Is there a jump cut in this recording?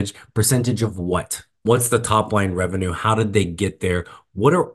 yes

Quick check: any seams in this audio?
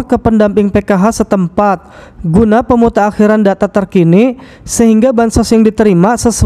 no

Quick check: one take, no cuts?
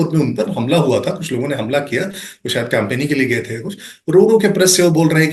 yes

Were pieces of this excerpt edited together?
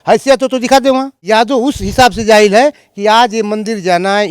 yes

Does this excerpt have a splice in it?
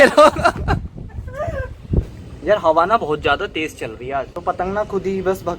yes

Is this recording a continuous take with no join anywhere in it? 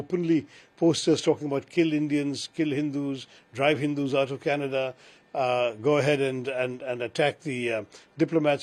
yes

